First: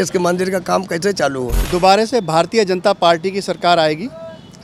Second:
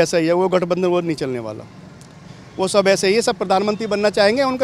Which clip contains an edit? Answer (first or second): first